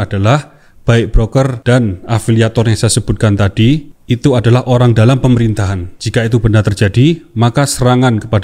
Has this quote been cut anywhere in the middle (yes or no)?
no